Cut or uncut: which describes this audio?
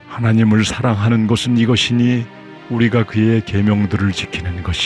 uncut